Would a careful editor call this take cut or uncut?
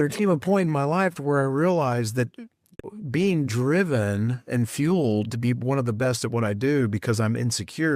cut